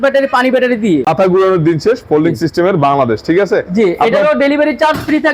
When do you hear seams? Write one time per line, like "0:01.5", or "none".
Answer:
0:01.1